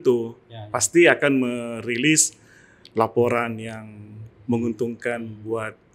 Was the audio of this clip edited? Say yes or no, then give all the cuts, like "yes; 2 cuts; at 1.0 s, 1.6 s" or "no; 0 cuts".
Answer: no; 0 cuts